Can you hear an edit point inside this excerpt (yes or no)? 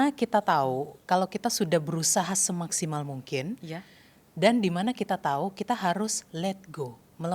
no